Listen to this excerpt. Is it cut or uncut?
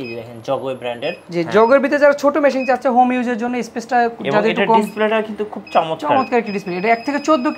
cut